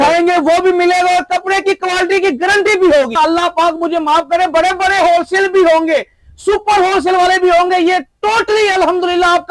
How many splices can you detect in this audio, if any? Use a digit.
1